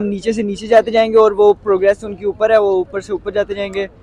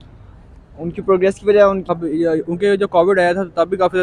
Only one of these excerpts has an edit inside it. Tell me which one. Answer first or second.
second